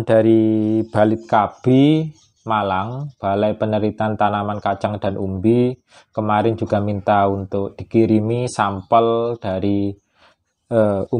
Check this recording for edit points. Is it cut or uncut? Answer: uncut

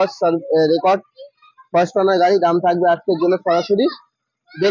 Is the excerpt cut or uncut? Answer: uncut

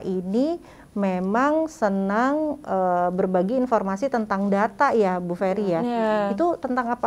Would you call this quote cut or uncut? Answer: uncut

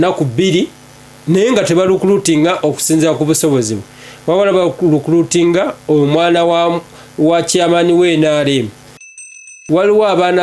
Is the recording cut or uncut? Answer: cut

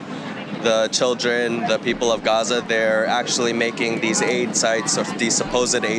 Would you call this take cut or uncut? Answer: uncut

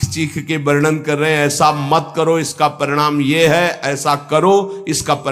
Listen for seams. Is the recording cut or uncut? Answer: uncut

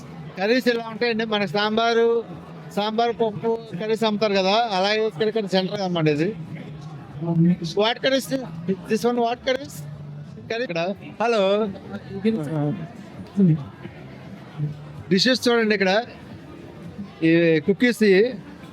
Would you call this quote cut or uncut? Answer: cut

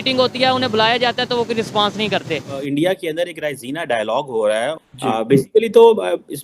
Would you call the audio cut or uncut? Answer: cut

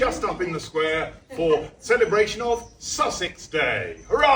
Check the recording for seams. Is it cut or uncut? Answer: uncut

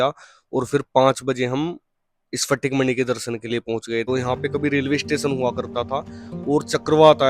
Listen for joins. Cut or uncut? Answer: cut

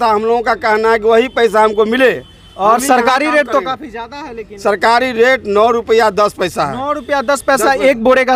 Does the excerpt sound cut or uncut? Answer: uncut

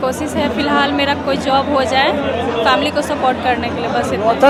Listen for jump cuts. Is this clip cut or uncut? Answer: uncut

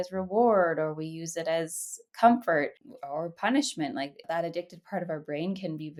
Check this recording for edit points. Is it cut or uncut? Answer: uncut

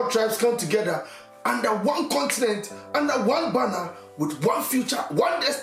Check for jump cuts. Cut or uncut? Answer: uncut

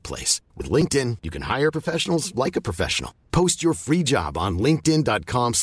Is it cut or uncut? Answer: uncut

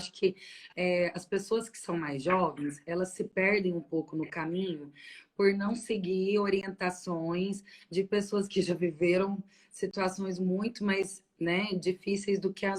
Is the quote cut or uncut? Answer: uncut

